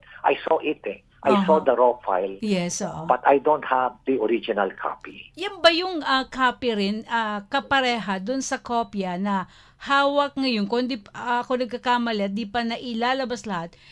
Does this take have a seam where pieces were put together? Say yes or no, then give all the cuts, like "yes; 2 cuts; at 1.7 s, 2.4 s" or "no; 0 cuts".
no; 0 cuts